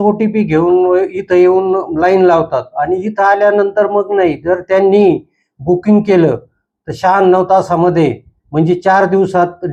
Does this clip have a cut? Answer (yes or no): no